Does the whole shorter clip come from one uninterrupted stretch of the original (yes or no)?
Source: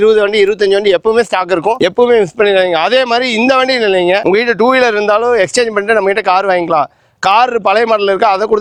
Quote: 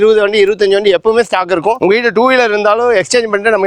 no